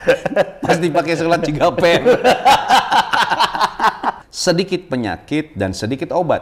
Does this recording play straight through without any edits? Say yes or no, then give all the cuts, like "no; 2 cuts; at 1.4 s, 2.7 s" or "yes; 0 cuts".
no; 1 cut; at 4.2 s